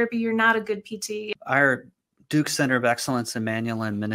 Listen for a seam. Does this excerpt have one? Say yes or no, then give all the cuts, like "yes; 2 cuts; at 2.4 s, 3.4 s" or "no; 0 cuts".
yes; 1 cut; at 1.3 s